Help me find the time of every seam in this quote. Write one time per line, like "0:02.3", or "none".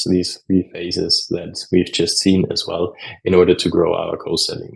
none